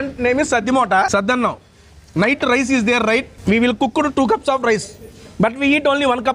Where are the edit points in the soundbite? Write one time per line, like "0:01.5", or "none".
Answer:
0:01.1
0:03.3